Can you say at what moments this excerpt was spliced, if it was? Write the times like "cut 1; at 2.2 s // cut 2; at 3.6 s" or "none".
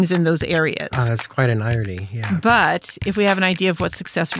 none